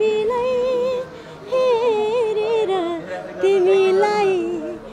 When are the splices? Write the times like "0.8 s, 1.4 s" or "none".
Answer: none